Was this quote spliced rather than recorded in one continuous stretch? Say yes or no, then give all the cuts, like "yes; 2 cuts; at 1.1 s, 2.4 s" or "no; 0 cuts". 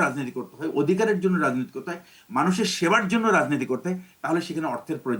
no; 0 cuts